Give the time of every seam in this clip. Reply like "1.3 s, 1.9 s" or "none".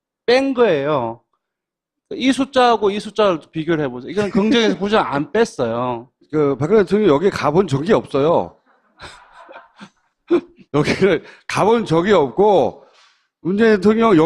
4.5 s